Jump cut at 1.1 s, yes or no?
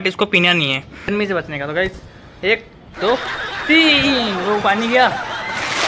yes